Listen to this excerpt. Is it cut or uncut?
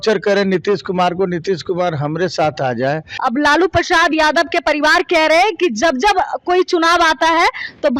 cut